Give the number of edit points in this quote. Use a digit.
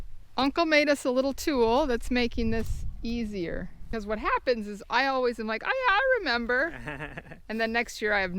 1